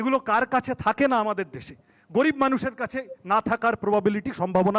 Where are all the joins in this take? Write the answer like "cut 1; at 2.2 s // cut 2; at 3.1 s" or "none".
none